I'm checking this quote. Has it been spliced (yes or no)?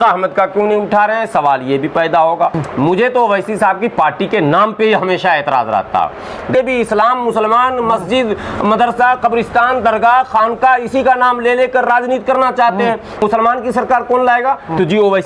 yes